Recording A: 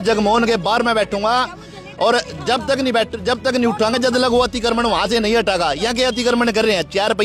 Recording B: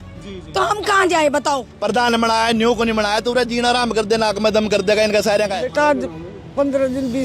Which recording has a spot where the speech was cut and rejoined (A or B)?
B